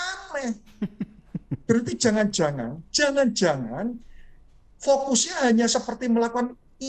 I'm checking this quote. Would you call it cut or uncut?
uncut